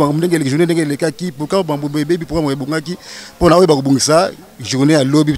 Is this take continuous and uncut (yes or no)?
yes